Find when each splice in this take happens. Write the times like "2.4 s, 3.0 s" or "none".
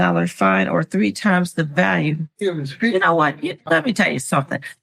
none